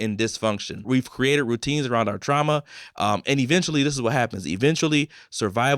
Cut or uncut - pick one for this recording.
uncut